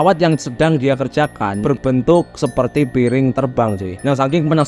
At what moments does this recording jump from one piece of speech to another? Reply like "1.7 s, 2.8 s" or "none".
1.6 s